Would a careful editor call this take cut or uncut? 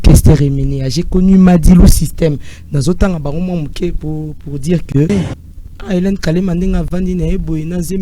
cut